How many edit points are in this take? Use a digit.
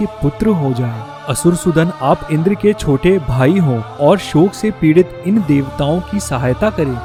0